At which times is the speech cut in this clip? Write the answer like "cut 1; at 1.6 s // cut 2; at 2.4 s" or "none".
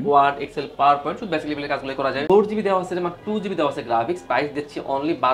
cut 1; at 2.2 s